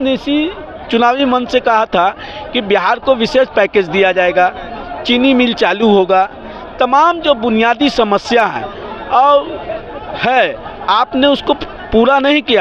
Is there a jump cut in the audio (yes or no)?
no